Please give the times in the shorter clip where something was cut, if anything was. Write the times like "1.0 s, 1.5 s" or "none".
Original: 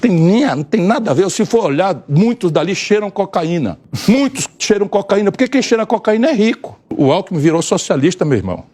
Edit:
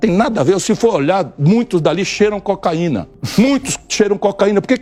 none